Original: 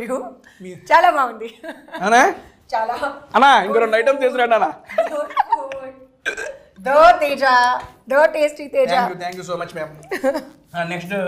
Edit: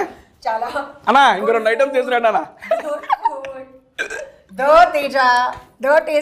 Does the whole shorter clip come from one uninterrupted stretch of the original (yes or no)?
yes